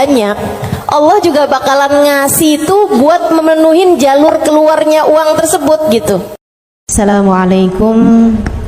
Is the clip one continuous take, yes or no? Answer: no